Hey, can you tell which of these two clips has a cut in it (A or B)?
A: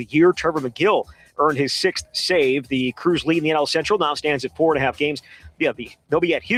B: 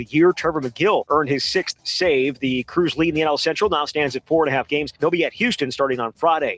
B